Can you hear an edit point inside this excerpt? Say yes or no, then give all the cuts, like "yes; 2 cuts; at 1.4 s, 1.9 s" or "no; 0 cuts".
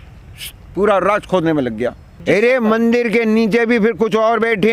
yes; 1 cut; at 2.1 s